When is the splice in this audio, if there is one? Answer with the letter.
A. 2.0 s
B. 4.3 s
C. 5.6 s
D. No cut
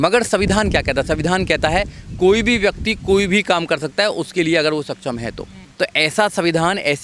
C